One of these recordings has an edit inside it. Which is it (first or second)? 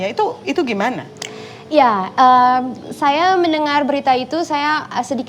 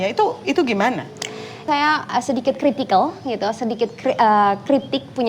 second